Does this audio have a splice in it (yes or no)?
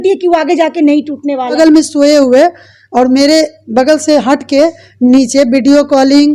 yes